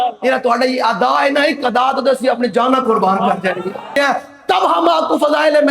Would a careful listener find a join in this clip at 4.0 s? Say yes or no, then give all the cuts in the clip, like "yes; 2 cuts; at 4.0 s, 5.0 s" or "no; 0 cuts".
yes; 1 cut; at 4.0 s